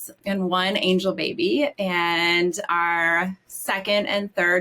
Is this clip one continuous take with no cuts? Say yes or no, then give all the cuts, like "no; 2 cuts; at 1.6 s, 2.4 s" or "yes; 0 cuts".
no; 1 cut; at 2.6 s